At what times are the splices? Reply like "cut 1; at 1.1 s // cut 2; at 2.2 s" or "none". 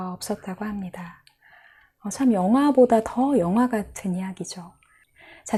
none